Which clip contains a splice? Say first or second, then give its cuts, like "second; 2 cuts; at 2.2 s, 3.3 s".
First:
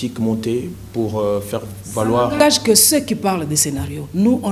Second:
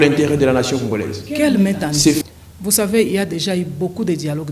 second; 1 cut; at 2.2 s